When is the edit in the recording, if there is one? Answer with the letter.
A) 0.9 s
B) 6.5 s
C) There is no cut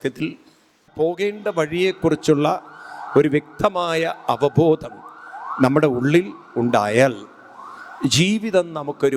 A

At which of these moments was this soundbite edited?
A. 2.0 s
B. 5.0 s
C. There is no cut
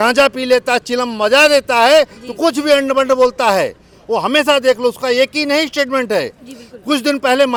C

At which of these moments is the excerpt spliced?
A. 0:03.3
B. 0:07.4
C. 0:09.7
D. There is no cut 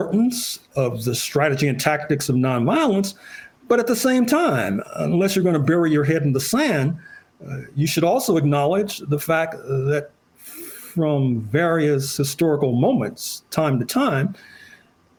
D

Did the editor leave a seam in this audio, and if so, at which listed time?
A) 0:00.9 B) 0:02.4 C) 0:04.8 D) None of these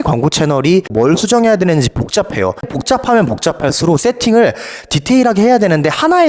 A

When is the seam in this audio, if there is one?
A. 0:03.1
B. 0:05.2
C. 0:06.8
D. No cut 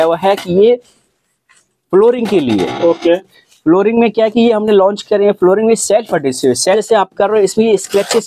C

